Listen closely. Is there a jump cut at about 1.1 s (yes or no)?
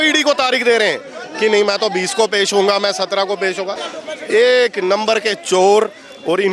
no